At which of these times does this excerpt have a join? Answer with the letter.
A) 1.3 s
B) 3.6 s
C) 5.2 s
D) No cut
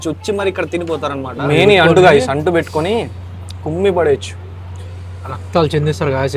A